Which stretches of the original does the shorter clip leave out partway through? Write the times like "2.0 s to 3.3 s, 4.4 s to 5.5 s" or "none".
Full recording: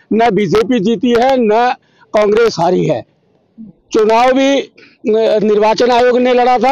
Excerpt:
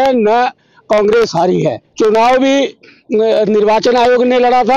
3.1 s to 3.8 s